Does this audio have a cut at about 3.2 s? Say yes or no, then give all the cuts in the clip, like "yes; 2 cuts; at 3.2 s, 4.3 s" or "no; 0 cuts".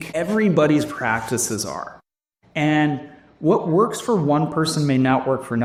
no; 0 cuts